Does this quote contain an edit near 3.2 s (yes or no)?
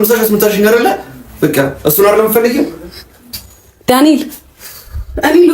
no